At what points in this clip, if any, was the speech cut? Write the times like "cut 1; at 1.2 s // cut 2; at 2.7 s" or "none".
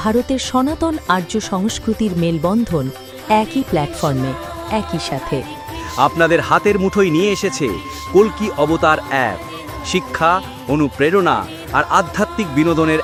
none